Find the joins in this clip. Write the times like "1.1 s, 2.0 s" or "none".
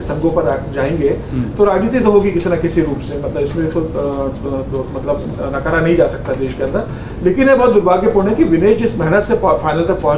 none